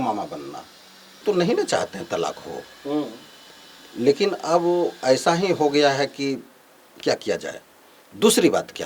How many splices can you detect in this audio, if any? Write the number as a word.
one